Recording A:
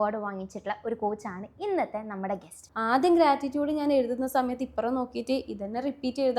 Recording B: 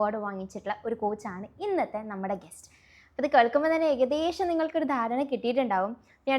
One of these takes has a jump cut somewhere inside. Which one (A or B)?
A